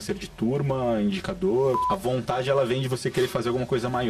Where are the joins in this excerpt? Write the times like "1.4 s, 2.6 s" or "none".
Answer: 1.8 s

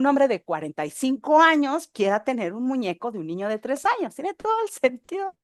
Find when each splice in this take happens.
none

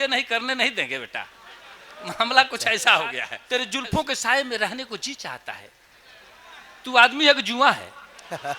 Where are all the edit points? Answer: 3.3 s

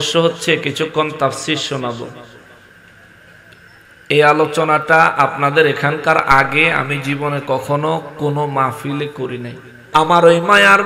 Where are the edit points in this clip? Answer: 9.8 s

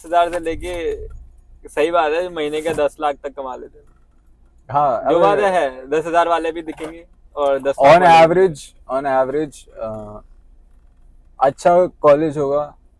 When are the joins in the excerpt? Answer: none

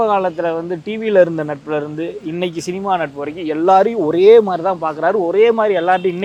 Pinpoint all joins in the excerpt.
none

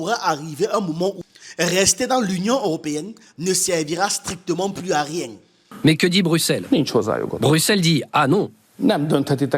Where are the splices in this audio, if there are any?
5.6 s

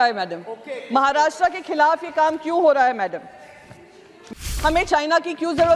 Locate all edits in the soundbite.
4.5 s

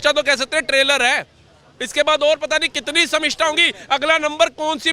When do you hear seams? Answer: none

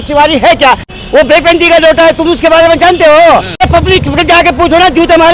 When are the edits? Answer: 0.9 s, 3.6 s

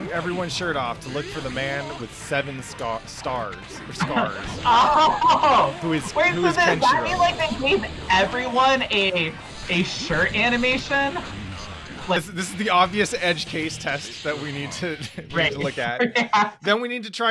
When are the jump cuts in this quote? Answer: 12.2 s

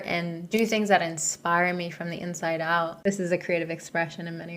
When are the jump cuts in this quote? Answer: 3.0 s

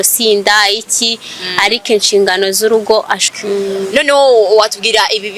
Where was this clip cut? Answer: 3.2 s

